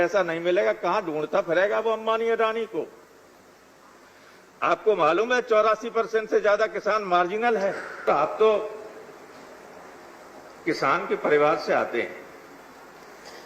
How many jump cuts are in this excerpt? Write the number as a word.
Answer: one